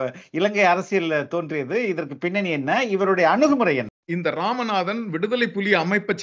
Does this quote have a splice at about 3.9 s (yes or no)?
yes